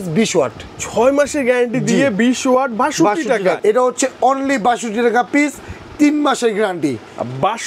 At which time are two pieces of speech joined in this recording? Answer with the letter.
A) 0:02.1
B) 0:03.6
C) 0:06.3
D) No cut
B